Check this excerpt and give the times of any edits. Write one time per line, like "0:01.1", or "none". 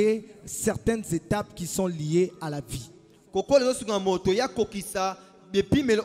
none